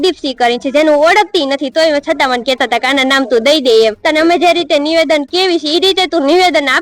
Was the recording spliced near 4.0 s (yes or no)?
yes